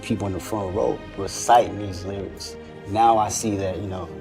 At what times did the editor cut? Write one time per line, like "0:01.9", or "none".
0:02.8